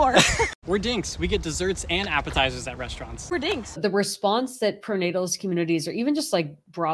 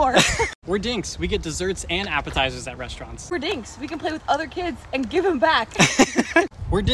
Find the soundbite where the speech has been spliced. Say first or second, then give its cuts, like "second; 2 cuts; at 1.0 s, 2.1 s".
first; 1 cut; at 3.8 s